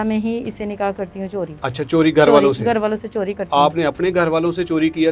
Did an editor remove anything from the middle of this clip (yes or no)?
no